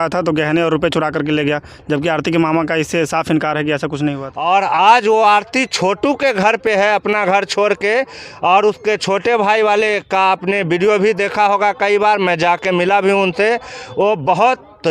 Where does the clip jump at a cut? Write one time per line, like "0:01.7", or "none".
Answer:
0:04.3